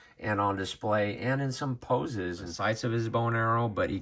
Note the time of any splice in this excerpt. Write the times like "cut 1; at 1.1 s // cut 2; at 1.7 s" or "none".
cut 1; at 2.5 s